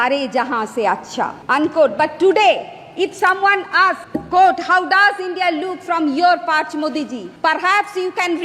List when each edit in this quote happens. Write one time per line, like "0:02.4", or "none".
0:01.4
0:04.1
0:07.2